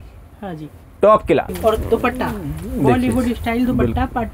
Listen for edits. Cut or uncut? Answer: cut